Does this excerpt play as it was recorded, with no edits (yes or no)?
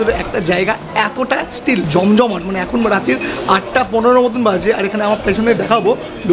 yes